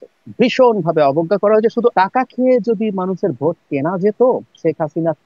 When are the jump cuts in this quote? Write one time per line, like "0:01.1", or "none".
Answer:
0:01.9